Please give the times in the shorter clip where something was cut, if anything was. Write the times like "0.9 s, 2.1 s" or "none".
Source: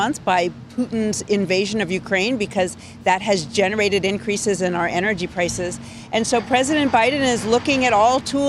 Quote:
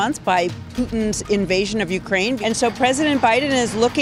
2.4 s